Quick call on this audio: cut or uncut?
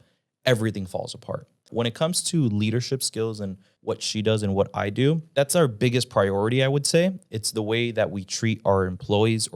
cut